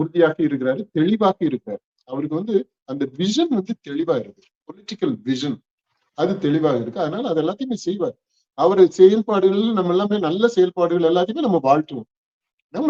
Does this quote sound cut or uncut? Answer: uncut